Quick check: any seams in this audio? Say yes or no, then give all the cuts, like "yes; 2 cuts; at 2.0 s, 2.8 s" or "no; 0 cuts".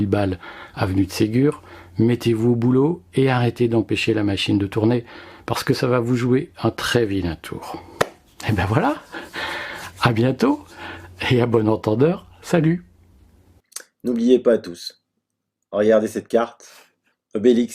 no; 0 cuts